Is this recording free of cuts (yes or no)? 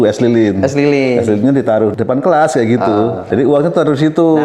no